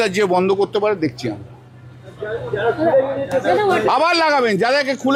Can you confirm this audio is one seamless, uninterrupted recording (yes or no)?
yes